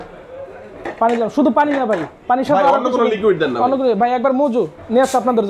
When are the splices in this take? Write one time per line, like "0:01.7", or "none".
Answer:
none